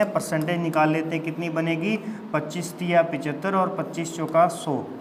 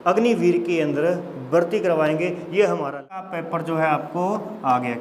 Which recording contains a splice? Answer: second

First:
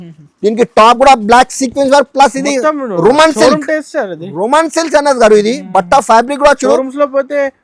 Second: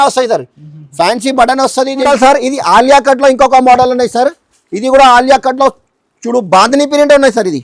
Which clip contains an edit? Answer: second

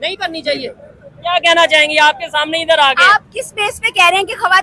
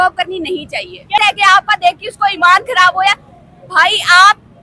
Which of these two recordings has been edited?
second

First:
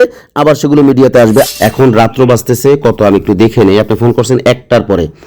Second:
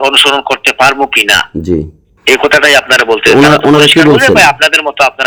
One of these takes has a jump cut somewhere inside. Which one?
first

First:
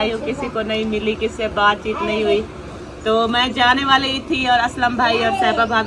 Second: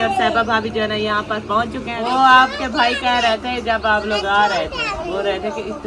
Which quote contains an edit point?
second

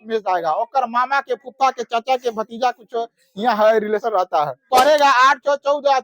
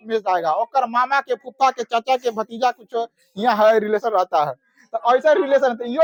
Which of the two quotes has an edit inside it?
first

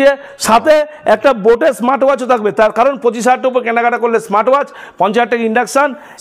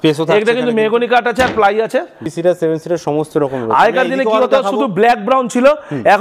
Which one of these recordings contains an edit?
second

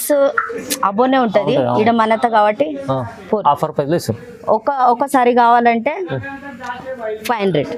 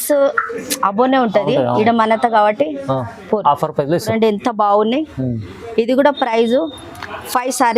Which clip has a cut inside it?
second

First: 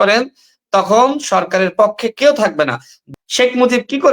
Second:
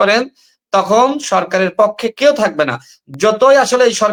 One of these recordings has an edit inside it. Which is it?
first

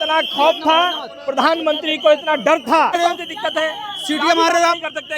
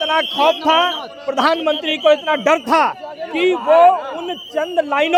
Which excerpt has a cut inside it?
first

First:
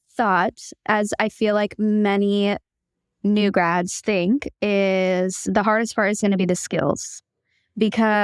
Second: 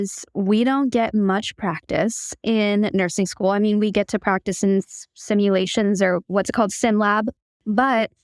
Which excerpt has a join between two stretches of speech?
second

